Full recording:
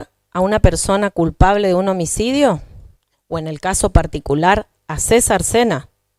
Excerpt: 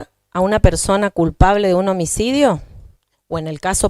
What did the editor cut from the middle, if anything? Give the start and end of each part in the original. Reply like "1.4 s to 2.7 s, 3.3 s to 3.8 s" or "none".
none